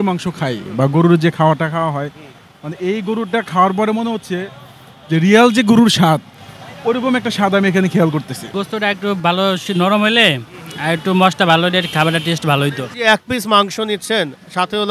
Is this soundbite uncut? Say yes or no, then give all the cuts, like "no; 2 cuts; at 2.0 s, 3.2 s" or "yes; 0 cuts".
no; 2 cuts; at 8.5 s, 12.9 s